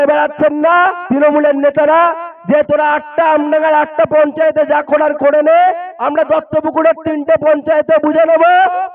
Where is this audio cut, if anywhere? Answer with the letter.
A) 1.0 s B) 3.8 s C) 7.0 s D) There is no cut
D